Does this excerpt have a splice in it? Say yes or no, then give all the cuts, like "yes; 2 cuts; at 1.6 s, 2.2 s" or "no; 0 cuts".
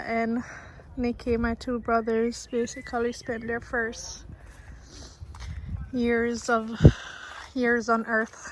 no; 0 cuts